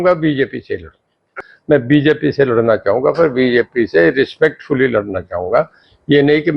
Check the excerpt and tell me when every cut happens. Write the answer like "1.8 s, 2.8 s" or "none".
1.4 s